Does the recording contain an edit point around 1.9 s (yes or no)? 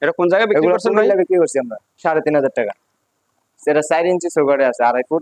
yes